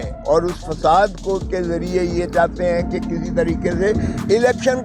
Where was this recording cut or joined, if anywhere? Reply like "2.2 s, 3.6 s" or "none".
none

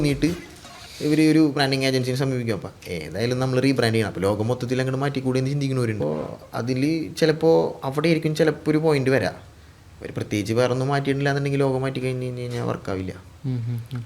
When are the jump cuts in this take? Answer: 6.0 s

